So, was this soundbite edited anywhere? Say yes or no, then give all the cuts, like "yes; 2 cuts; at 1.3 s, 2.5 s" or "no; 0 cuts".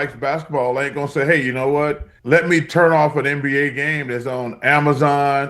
yes; 1 cut; at 2.1 s